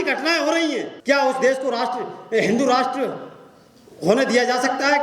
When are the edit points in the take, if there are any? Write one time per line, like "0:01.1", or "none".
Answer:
0:00.9